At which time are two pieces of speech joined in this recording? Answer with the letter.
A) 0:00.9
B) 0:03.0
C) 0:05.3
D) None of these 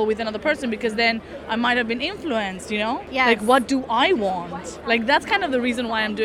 B